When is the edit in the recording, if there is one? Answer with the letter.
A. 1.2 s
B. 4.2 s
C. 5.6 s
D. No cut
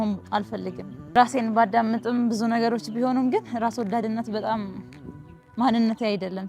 A